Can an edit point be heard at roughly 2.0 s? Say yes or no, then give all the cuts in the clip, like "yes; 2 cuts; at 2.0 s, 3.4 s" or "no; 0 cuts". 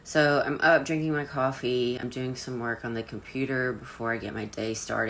yes; 1 cut; at 2.0 s